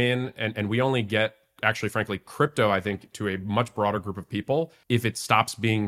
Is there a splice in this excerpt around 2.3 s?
no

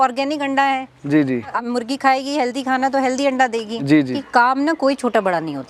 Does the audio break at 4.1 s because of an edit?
yes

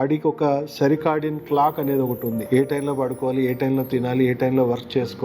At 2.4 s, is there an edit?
yes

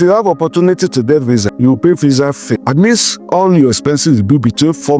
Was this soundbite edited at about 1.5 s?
yes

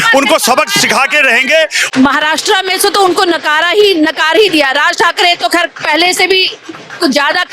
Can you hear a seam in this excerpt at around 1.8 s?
yes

